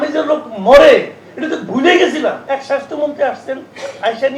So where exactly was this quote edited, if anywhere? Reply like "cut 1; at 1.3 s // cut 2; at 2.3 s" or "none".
cut 1; at 2.4 s